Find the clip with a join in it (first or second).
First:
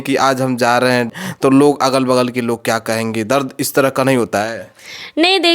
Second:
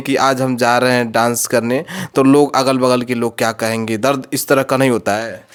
first